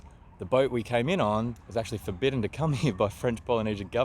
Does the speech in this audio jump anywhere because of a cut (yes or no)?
yes